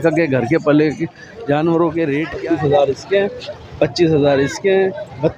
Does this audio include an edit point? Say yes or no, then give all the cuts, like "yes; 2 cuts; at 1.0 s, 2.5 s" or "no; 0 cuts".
yes; 1 cut; at 2.3 s